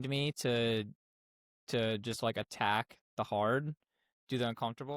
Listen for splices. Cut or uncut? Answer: uncut